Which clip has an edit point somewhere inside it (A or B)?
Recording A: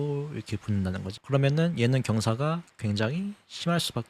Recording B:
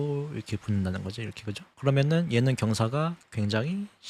A